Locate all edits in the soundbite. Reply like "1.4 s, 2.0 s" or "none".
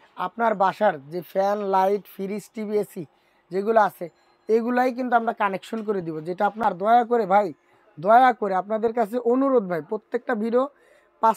6.6 s